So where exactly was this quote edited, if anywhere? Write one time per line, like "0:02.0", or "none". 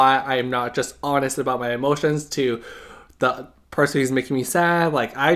none